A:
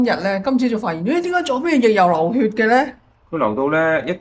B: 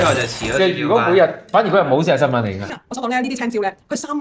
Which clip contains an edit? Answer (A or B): B